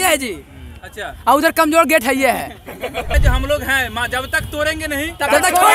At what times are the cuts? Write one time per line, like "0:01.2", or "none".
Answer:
0:03.1

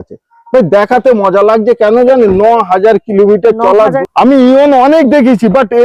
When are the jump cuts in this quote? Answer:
0:04.0

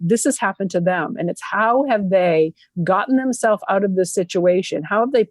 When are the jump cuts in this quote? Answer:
none

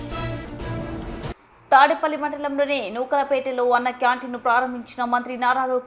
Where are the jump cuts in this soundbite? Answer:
0:01.3

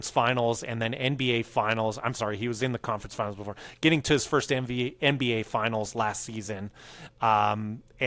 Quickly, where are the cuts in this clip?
none

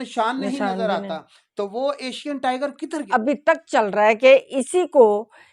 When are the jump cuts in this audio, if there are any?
0:03.0

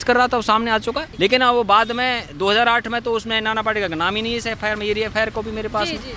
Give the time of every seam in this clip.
0:01.1

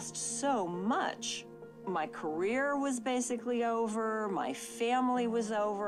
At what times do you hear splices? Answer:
none

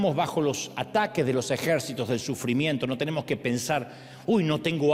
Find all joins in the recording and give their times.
none

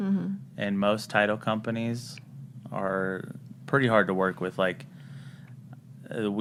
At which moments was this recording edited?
none

